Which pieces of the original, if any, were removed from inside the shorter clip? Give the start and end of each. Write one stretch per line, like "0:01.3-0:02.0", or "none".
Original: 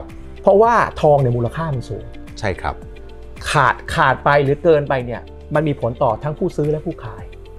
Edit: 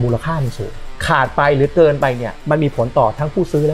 0:02.3-0:03.8
0:05.2-0:05.4